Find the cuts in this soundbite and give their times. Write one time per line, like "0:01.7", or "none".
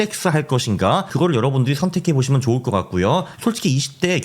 0:01.1
0:03.3